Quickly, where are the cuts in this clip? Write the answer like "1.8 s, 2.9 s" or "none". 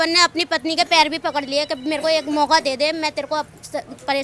none

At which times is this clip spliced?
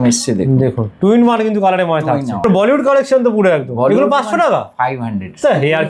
2.4 s

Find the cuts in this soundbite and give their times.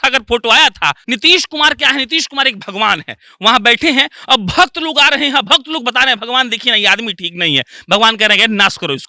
1.0 s

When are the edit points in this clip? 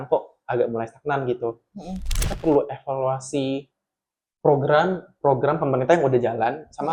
2.1 s

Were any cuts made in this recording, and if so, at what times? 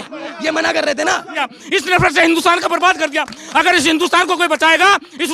1.4 s

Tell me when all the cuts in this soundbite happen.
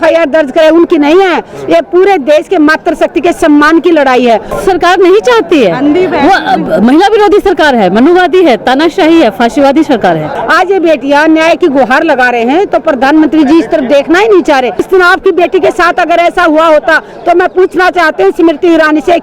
4.6 s, 10.3 s, 14.8 s

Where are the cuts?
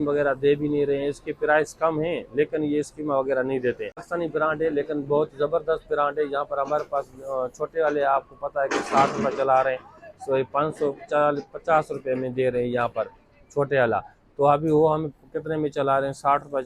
none

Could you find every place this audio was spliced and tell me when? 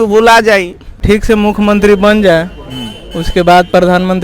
1.0 s

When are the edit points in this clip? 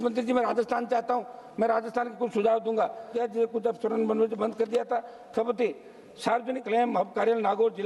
3.1 s, 6.6 s

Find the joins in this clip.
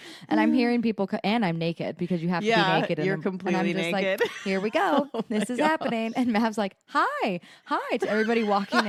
none

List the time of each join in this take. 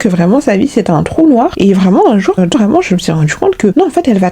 2.5 s

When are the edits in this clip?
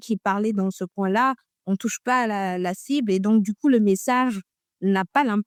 none

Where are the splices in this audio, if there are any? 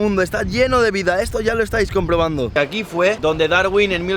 2.5 s

